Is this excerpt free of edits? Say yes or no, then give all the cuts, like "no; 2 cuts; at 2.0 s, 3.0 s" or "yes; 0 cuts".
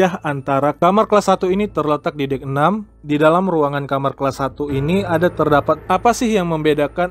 no; 3 cuts; at 0.8 s, 2.9 s, 5.8 s